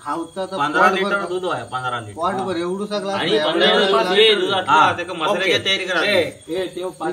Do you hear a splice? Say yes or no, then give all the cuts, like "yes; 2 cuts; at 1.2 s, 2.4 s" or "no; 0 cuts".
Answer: no; 0 cuts